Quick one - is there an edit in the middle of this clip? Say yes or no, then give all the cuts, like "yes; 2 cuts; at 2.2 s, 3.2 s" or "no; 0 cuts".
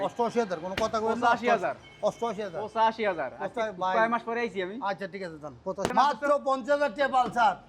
yes; 1 cut; at 5.9 s